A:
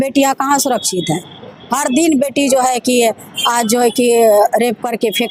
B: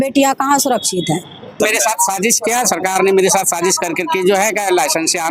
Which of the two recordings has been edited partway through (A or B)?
B